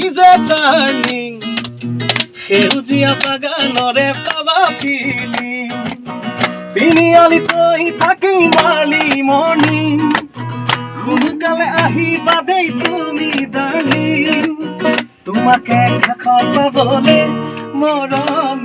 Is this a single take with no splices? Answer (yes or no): yes